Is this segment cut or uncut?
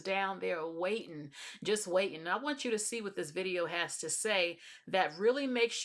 uncut